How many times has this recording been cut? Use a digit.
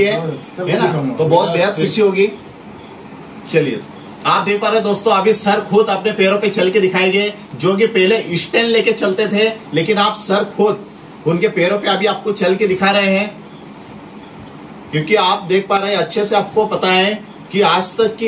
0